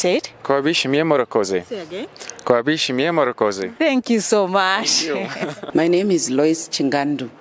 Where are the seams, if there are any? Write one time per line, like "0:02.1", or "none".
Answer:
0:05.6